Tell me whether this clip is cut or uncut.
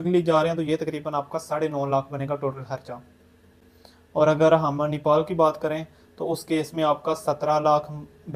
uncut